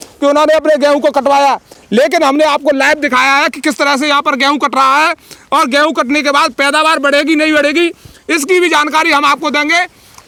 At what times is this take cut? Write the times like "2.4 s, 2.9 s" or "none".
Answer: none